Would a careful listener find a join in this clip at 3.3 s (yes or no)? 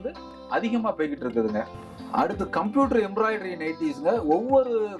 no